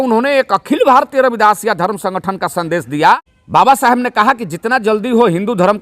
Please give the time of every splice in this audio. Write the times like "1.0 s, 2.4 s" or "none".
3.3 s